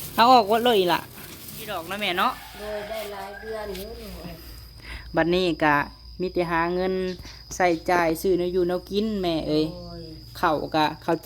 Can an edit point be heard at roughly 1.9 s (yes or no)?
yes